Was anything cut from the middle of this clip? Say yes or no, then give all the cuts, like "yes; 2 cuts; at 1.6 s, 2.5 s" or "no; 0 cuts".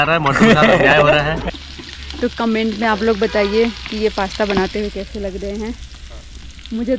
yes; 1 cut; at 1.4 s